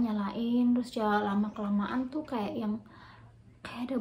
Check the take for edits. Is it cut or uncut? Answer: uncut